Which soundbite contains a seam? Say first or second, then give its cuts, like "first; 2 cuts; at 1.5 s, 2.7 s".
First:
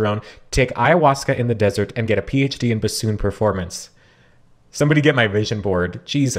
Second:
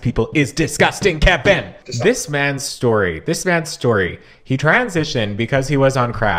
second; 1 cut; at 1.8 s